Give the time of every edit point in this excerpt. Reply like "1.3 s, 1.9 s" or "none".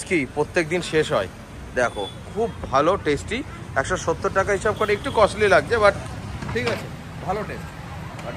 none